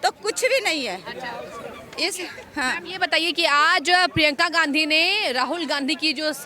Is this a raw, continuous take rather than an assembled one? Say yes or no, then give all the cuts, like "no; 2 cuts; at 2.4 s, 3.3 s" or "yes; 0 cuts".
yes; 0 cuts